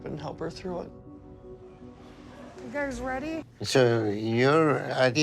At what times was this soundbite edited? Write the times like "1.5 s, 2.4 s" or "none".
3.4 s